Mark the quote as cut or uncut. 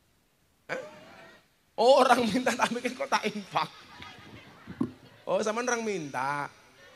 uncut